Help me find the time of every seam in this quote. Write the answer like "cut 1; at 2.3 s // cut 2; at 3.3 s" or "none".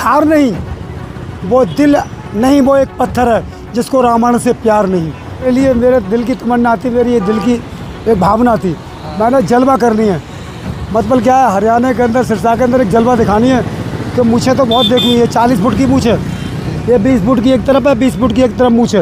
cut 1; at 5.5 s